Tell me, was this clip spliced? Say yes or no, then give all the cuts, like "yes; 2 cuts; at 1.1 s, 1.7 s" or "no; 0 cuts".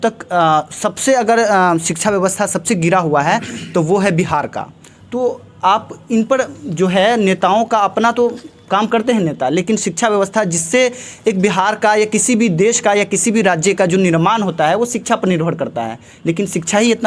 no; 0 cuts